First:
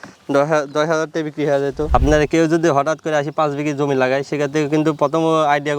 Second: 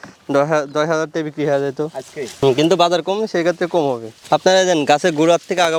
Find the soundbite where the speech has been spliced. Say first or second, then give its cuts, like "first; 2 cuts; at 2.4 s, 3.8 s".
first; 1 cut; at 1.9 s